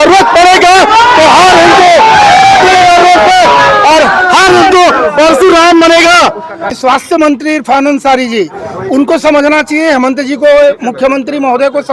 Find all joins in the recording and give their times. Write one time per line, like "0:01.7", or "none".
0:06.9